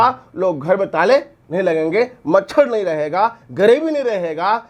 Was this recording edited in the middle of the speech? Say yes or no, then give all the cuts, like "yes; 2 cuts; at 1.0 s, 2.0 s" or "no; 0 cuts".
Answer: no; 0 cuts